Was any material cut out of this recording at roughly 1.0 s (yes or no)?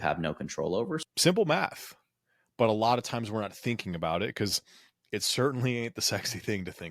yes